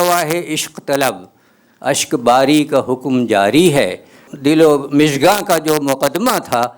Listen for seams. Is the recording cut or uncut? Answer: cut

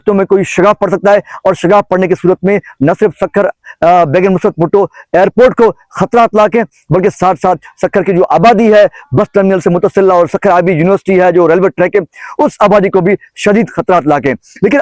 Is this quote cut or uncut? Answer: uncut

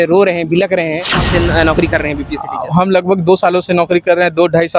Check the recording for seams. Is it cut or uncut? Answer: cut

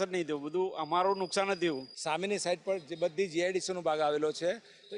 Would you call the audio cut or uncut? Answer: cut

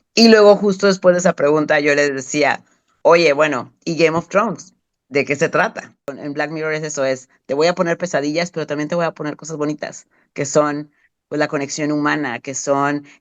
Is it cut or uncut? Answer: cut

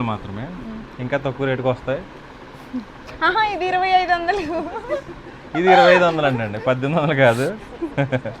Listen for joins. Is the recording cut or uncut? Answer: uncut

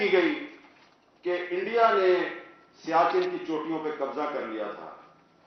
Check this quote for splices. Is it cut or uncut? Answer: uncut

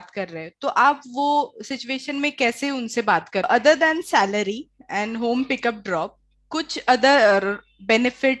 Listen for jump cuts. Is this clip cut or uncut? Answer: cut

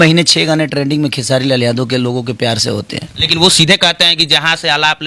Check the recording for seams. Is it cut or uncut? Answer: uncut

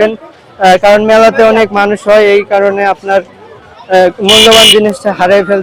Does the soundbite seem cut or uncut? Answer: uncut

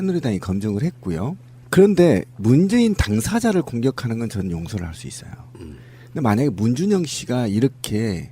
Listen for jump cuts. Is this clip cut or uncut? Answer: cut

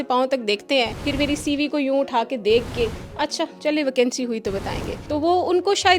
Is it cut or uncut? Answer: cut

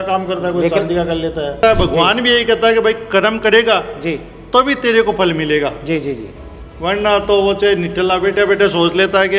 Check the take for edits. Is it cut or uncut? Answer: cut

